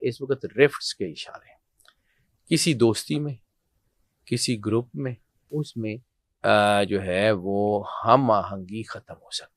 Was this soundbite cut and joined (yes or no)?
yes